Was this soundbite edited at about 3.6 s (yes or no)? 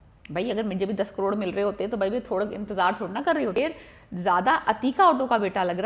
yes